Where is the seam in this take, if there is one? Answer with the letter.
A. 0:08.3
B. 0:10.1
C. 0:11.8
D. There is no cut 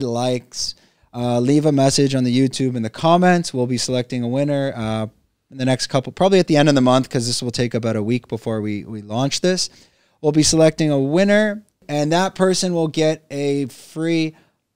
C